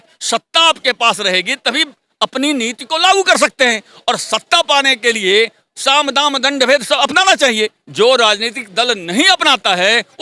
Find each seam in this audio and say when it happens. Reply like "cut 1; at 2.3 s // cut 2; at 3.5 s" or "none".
none